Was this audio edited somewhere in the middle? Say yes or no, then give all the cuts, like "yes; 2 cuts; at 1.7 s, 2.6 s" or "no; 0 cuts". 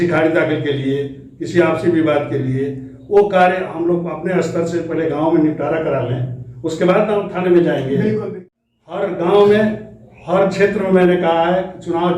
yes; 1 cut; at 8.4 s